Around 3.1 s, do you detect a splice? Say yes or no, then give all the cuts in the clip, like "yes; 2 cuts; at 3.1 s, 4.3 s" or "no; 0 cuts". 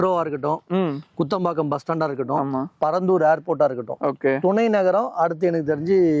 no; 0 cuts